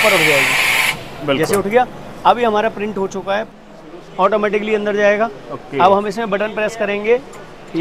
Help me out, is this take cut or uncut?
cut